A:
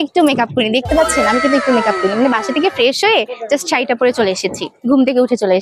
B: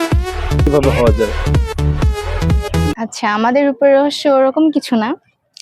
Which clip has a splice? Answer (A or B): B